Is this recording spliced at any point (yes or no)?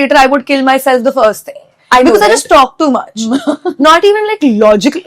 no